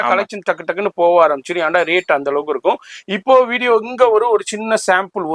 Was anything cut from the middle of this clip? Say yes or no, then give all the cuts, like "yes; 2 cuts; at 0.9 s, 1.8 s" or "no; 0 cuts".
no; 0 cuts